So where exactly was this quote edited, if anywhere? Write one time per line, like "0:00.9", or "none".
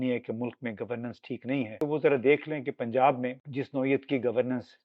0:01.8
0:03.4